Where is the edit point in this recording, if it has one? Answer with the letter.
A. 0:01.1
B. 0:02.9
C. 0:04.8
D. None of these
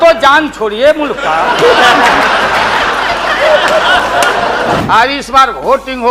C